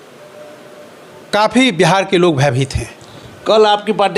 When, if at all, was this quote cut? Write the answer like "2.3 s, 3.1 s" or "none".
none